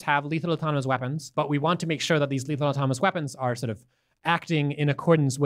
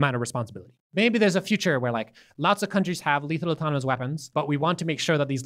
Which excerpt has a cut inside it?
second; 1 cut; at 0.9 s

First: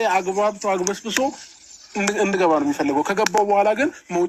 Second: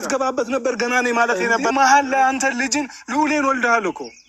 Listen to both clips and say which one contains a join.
second; 1 cut; at 1.7 s

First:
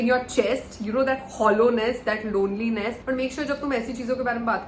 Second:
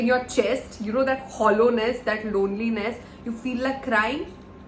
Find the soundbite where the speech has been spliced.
first; 1 cut; at 3.0 s

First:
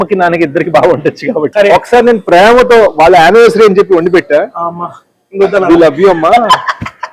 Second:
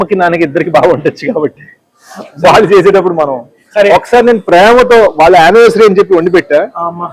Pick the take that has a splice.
first; 1 cut; at 1.5 s

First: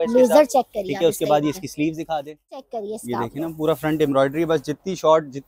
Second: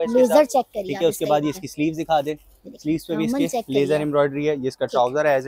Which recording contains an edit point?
first; 1 cut; at 2.7 s

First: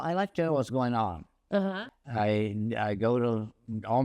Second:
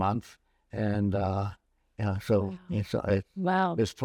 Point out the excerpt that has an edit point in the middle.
first; 1 cut; at 1.8 s

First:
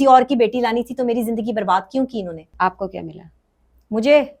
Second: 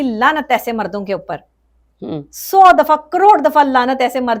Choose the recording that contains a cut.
first; 1 cut; at 2.5 s

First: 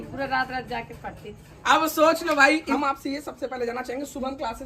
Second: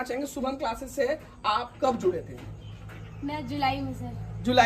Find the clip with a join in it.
first; 1 cut; at 2.7 s

